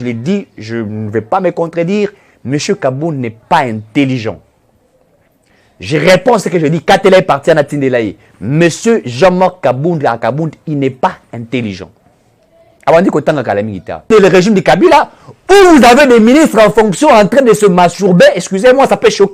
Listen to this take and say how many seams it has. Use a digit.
1